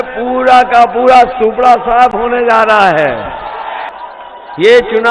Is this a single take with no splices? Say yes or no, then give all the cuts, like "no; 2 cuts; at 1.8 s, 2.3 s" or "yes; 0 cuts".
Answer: no; 1 cut; at 3.9 s